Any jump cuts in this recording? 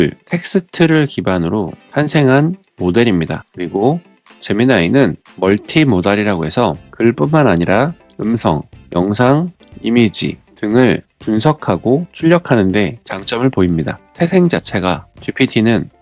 no; 0 cuts

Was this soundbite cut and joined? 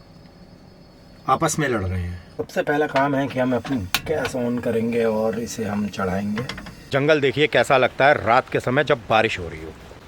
yes; 2 cuts; at 2.4 s, 6.9 s

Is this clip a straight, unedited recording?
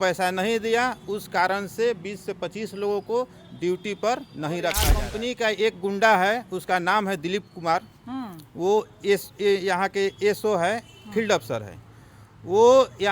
no; 1 cut; at 5.0 s

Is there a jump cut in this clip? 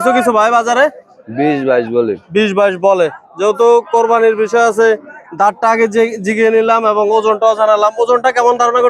no; 0 cuts

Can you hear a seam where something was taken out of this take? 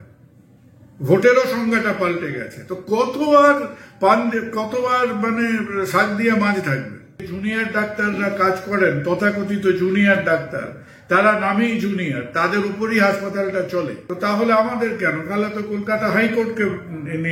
yes; 2 cuts; at 7.3 s, 14.0 s

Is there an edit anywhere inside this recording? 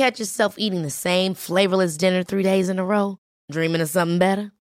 no; 0 cuts

